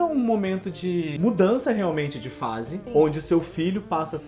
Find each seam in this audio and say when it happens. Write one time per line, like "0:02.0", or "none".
0:01.1
0:02.7